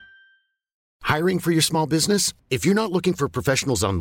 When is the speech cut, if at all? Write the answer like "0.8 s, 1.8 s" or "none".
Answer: none